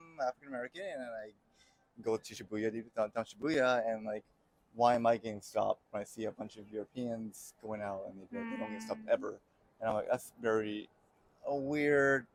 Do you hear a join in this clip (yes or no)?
no